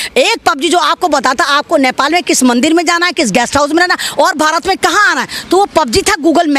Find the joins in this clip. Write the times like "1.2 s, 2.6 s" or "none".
none